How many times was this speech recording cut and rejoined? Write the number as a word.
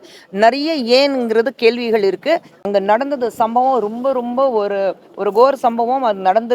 one